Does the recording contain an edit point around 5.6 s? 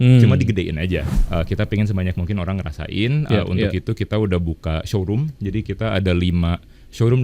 no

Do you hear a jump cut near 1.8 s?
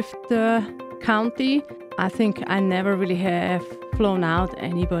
yes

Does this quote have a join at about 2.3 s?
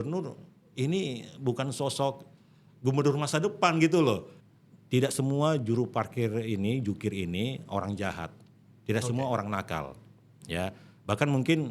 no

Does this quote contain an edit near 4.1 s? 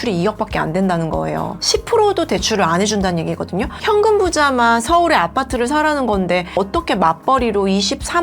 no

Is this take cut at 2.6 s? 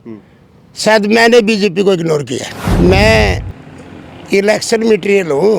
yes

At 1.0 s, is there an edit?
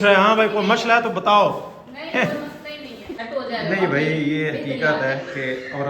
no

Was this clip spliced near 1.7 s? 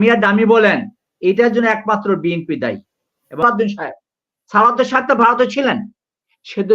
no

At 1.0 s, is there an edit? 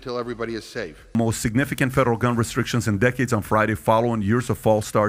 no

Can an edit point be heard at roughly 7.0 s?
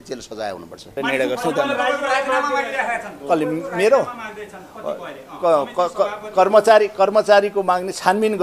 no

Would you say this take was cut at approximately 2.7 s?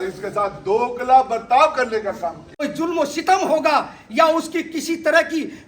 yes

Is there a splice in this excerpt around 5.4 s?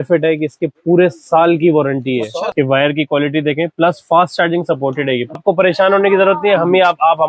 yes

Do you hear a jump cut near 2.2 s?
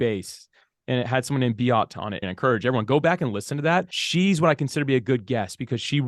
yes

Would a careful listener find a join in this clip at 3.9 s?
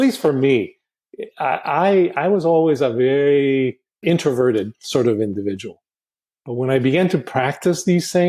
yes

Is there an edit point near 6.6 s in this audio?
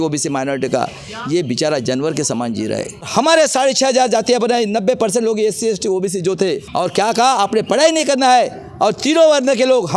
yes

